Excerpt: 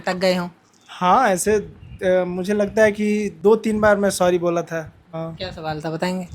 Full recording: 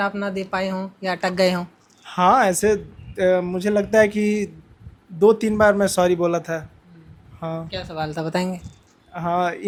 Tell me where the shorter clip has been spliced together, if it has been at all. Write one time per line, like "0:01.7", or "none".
0:03.3
0:05.0

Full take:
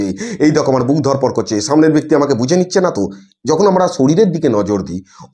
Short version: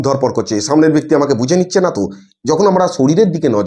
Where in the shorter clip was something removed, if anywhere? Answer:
none

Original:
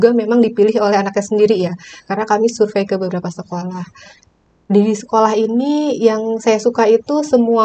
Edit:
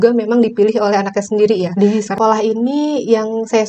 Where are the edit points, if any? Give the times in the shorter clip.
0:01.7

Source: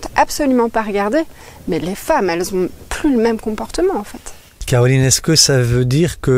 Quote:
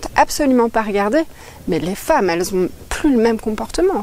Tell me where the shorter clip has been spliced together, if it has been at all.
none

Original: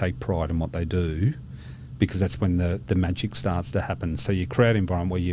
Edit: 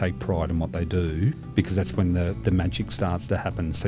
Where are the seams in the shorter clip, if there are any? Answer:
0:01.4

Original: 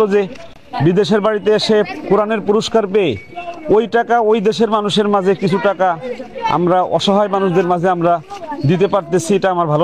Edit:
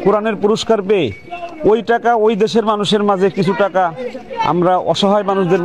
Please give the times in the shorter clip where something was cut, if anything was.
none

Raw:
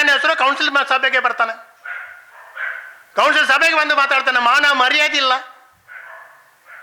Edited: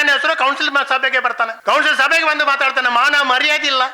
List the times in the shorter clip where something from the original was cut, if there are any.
0:01.6

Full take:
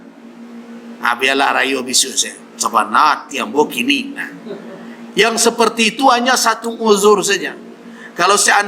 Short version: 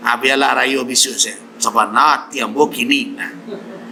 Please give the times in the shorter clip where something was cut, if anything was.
none

